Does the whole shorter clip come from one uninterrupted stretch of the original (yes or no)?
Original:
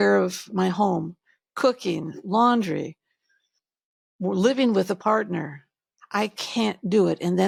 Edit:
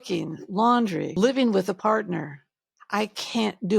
no